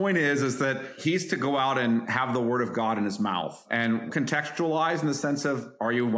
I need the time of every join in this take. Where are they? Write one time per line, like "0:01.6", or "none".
0:00.9
0:02.1
0:04.0